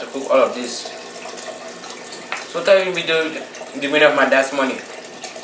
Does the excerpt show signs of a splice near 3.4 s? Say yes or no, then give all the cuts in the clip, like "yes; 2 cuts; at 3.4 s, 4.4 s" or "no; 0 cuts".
no; 1 cut; at 1.8 s